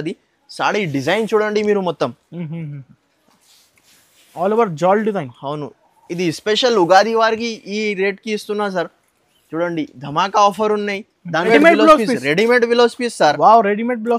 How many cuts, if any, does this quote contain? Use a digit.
1